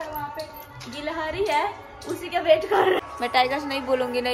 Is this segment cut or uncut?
cut